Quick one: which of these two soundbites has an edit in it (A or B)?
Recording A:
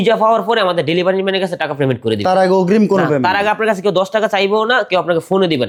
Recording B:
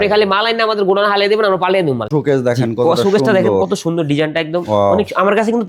B